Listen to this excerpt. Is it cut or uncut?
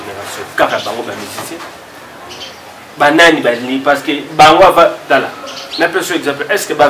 uncut